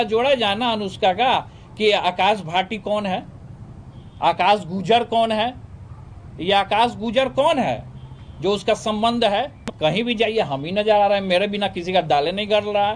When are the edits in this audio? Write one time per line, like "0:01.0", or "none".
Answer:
0:09.6